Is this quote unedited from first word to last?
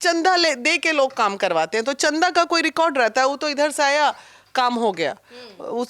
yes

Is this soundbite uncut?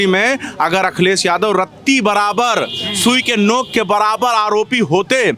yes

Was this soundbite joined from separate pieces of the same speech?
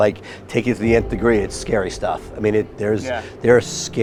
no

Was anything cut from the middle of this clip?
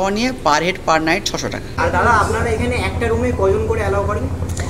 no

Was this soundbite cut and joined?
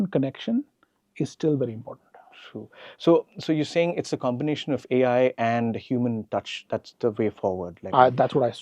no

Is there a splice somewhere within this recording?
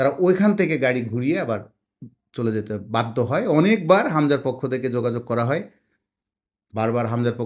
no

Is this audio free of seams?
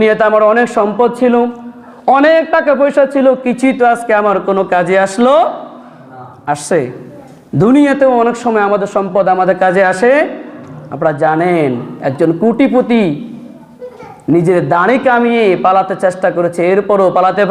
yes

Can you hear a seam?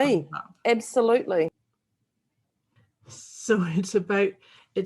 yes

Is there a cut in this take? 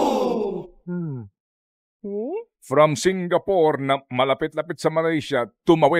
no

